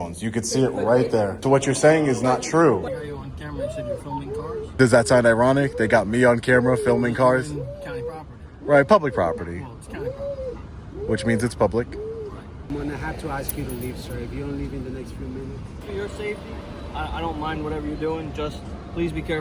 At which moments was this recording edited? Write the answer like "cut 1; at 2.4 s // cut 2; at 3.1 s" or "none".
cut 1; at 1.4 s // cut 2; at 2.9 s // cut 3; at 4.8 s // cut 4; at 12.6 s // cut 5; at 15.8 s